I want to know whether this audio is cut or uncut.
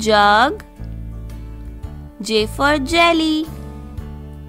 uncut